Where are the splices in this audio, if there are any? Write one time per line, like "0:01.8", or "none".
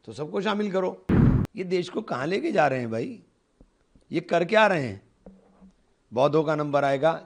0:01.0